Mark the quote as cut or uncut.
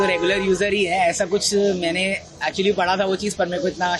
uncut